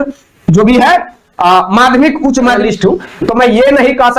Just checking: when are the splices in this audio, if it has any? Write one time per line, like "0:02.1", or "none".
0:02.6